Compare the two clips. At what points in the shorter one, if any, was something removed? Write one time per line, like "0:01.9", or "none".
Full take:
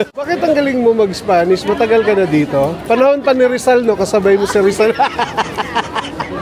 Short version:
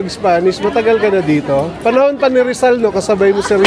none